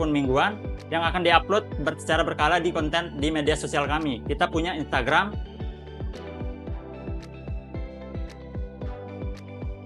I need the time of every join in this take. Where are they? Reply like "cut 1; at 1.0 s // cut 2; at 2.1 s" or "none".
cut 1; at 5.3 s